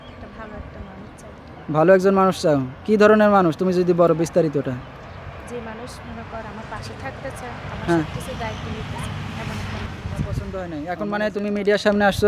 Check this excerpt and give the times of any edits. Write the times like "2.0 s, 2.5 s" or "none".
10.4 s